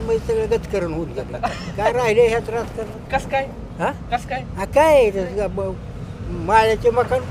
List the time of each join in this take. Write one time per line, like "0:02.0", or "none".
none